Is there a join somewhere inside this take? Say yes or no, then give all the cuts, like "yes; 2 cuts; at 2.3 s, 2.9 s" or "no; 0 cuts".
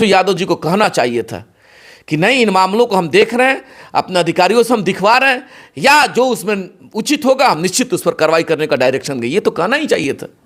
no; 0 cuts